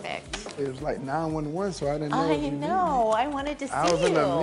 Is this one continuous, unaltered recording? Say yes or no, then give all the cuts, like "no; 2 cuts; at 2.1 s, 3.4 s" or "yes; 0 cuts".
yes; 0 cuts